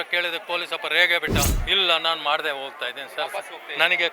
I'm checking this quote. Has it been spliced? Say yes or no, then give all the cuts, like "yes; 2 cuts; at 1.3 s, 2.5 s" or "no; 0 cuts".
yes; 1 cut; at 1.6 s